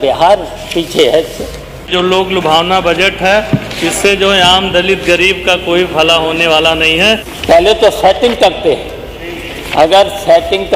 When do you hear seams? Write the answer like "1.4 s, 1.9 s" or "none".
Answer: 1.9 s, 7.3 s